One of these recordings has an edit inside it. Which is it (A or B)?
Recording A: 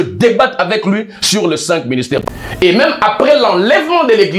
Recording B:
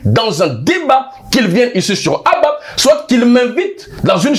A